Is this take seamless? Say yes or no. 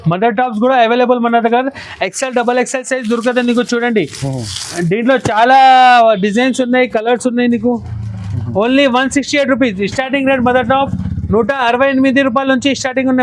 yes